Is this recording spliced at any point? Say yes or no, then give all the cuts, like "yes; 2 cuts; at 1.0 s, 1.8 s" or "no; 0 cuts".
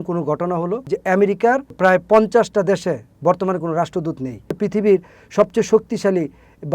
yes; 3 cuts; at 0.8 s, 1.7 s, 4.5 s